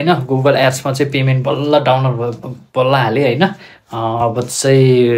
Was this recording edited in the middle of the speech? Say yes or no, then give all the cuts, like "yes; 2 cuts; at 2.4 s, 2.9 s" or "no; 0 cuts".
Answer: no; 0 cuts